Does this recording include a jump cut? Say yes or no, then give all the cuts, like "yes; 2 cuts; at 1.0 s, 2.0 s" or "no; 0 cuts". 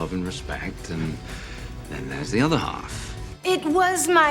yes; 1 cut; at 3.3 s